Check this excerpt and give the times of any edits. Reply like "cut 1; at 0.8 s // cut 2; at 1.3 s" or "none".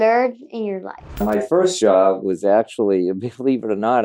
cut 1; at 1.1 s